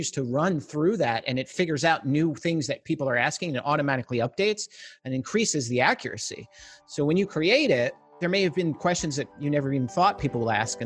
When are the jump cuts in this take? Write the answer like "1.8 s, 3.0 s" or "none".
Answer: 8.2 s, 9.3 s